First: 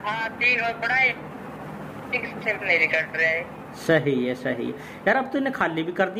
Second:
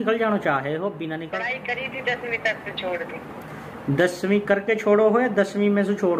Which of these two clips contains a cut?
second; 1 cut; at 1.2 s

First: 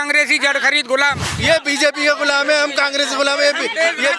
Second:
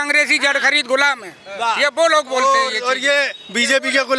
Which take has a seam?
first; 1 cut; at 1.4 s

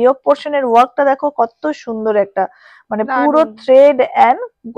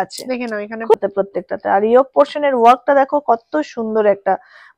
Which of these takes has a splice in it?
second; 1 cut; at 0.9 s

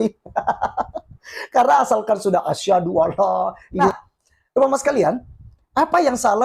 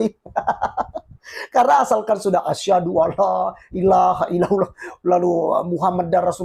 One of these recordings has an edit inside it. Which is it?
first; 1 cut; at 3.7 s

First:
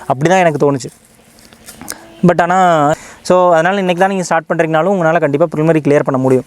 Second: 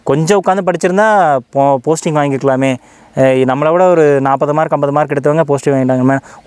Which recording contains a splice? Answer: first; 1 cut; at 2.9 s

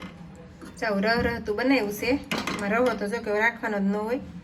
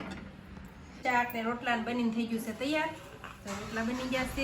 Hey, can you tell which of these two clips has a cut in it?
second; 1 cut; at 1.0 s

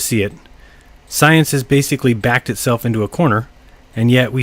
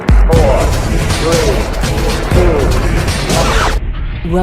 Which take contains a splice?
first; 1 cut; at 3.4 s

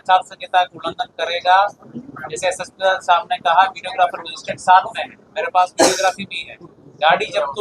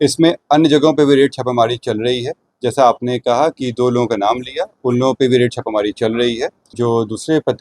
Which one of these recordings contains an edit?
second; 1 cut; at 6.6 s

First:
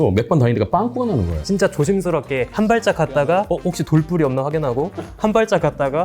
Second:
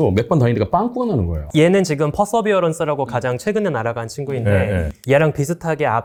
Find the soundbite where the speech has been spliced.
first; 1 cut; at 1.3 s

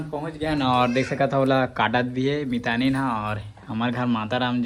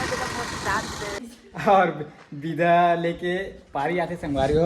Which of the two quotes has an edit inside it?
second; 1 cut; at 1.2 s

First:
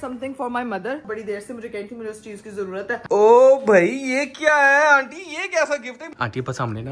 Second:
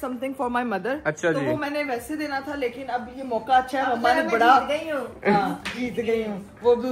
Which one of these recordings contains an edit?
first; 3 cuts; at 1.0 s, 3.0 s, 6.1 s

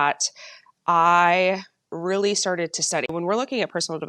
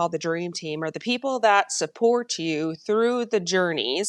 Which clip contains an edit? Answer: first; 1 cut; at 3.1 s

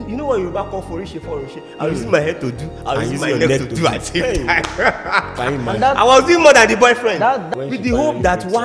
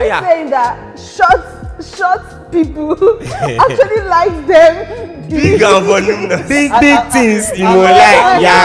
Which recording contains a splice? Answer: first; 1 cut; at 7.4 s

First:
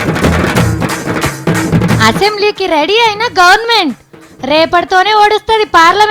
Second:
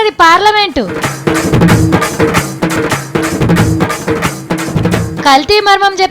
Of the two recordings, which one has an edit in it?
second; 1 cut; at 2.8 s

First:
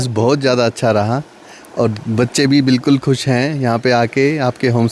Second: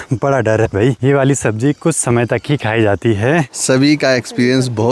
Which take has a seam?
second; 2 cuts; at 1.0 s, 3.5 s

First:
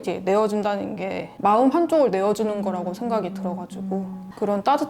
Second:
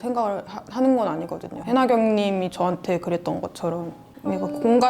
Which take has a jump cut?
second; 1 cut; at 4.0 s

